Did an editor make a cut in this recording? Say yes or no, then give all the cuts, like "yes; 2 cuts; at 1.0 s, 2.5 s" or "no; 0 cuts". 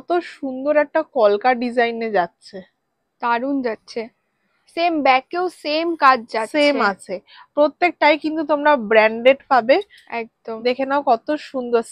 no; 0 cuts